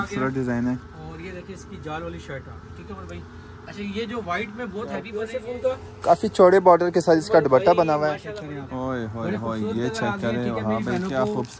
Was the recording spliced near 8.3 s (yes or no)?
yes